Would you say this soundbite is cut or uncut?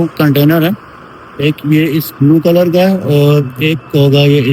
uncut